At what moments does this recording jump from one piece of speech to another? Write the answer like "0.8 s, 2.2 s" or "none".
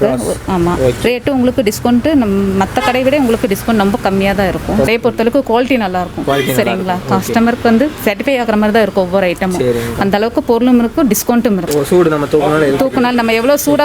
4.9 s, 11.6 s